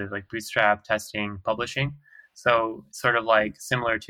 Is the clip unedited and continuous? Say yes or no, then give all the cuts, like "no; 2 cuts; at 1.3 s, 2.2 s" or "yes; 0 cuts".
yes; 0 cuts